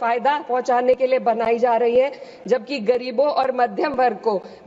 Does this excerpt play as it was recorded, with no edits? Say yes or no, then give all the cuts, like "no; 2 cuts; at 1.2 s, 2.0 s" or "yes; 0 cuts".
yes; 0 cuts